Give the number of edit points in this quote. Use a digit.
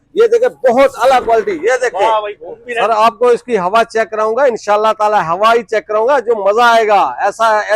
1